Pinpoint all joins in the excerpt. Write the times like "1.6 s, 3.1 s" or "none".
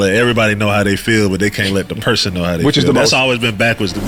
none